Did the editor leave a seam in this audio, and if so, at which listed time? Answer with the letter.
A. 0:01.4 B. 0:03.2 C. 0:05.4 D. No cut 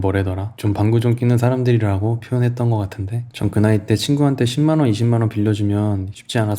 B